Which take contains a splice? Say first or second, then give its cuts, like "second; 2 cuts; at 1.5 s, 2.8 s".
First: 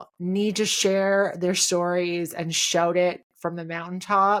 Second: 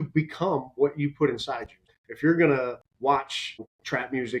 second; 2 cuts; at 1.9 s, 3.3 s